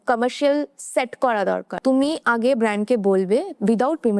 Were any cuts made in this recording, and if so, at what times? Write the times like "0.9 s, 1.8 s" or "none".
1.7 s